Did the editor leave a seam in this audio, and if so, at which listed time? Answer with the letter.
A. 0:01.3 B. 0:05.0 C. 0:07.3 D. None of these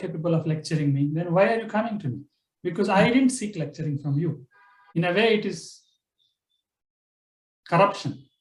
B